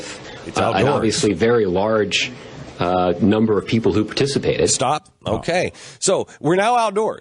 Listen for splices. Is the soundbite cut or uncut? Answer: uncut